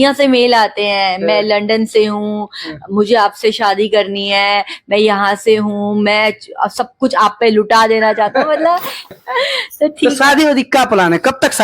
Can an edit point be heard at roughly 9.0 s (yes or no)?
yes